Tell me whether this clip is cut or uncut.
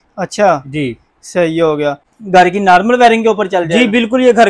uncut